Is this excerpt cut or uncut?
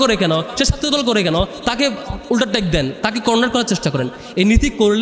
uncut